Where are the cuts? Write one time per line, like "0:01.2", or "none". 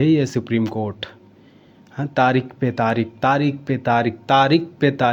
none